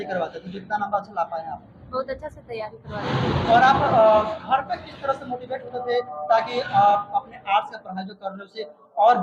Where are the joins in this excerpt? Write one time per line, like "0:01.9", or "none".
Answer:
none